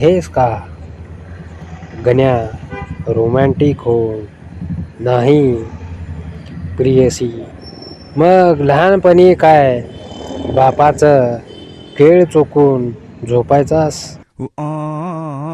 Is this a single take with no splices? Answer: no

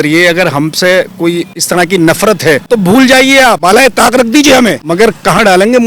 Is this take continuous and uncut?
no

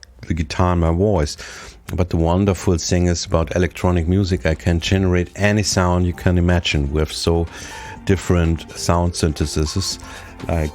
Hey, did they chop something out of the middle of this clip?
yes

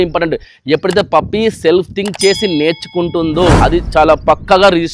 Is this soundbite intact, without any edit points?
yes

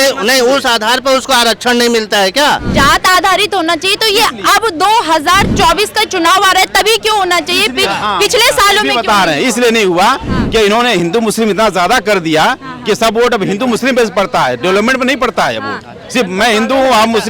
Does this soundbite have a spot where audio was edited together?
yes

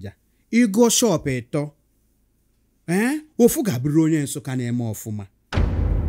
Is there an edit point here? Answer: no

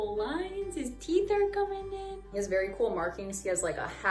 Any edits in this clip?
yes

